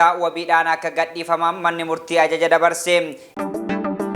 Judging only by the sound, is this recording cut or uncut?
cut